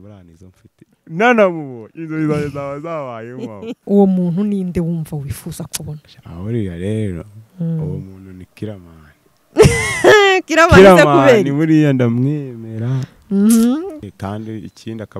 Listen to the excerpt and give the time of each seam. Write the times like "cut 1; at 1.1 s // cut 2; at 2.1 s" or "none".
cut 1; at 3.8 s // cut 2; at 14.0 s